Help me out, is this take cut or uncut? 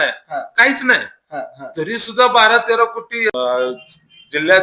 cut